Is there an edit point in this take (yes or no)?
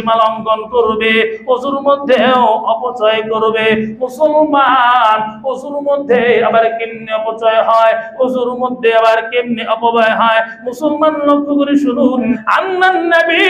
yes